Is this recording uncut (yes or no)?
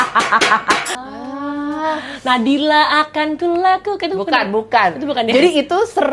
no